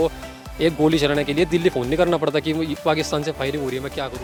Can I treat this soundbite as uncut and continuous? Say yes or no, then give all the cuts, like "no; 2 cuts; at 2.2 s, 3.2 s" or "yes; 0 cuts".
yes; 0 cuts